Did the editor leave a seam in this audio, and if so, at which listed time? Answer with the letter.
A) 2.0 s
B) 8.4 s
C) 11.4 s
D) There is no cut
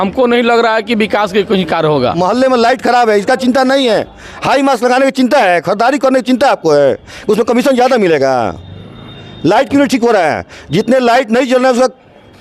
A